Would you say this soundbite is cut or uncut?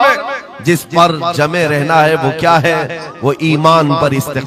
uncut